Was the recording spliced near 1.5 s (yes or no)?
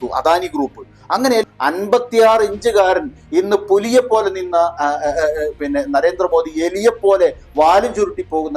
yes